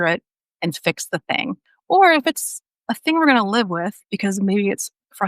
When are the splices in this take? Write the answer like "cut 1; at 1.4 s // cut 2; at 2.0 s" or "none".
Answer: cut 1; at 1.6 s